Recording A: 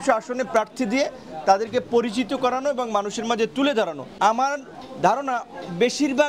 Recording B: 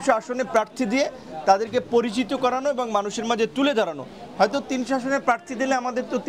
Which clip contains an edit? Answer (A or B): A